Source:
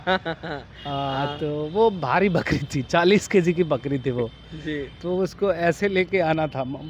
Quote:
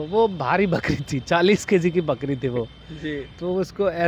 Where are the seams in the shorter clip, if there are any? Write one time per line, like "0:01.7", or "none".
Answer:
none